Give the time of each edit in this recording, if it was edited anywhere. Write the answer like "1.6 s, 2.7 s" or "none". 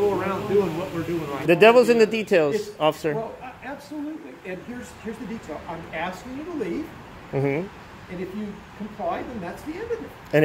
1.4 s

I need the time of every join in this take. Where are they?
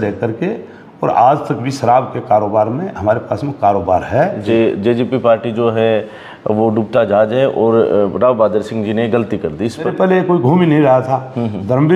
4.4 s, 9.9 s

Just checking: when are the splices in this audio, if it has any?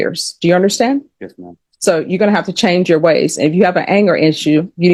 none

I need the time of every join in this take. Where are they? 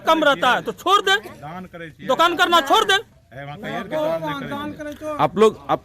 none

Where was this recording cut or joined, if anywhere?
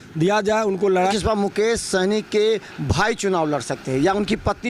1.1 s

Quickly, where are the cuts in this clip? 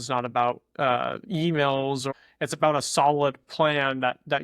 2.1 s

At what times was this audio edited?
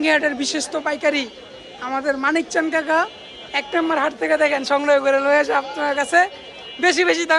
none

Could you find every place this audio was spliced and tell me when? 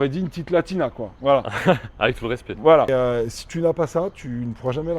2.9 s

